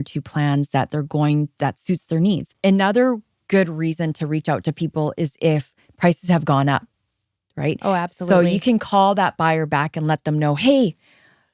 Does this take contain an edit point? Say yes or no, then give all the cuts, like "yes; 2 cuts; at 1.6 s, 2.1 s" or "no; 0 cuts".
yes; 1 cut; at 2.5 s